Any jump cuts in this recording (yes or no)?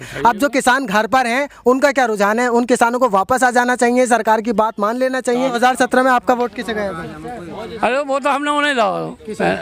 yes